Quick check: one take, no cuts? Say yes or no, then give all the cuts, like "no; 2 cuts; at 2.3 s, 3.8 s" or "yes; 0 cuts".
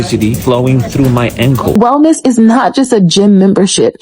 no; 1 cut; at 1.8 s